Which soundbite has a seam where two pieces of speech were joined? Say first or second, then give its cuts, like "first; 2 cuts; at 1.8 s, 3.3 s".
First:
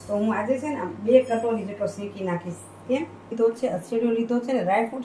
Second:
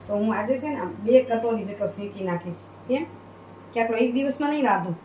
first; 1 cut; at 3.3 s